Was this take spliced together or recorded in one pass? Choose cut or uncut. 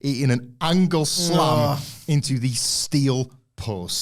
uncut